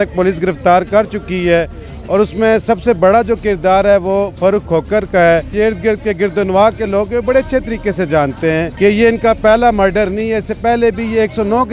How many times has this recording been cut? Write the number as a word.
two